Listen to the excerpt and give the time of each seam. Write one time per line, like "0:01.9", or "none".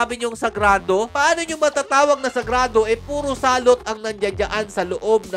none